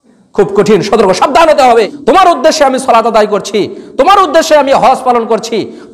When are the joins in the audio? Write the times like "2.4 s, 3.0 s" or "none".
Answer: 1.9 s